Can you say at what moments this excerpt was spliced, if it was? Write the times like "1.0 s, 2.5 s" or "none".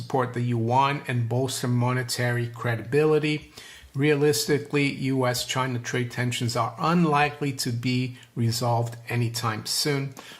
3.4 s